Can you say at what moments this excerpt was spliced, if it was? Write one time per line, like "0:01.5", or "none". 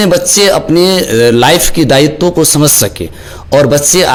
none

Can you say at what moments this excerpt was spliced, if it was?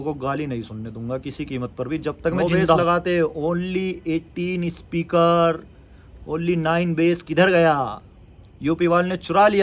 0:02.8

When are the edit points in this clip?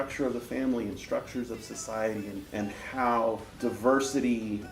0:02.4
0:03.5

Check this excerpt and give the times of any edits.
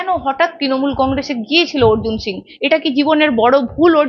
none

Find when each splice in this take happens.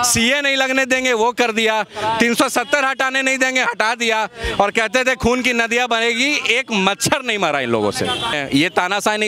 0:08.4

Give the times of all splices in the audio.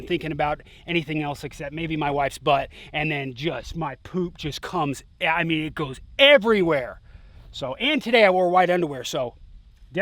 none

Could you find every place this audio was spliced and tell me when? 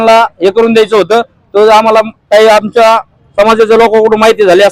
none

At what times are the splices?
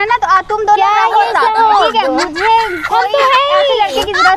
none

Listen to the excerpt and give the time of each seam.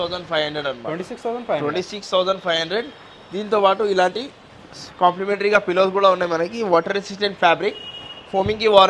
none

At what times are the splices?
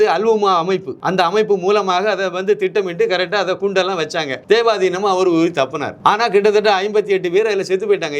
0:00.9
0:04.3
0:05.8

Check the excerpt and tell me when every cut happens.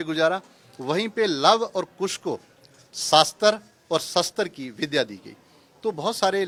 none

